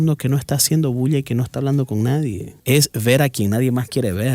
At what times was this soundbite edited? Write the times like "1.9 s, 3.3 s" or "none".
2.5 s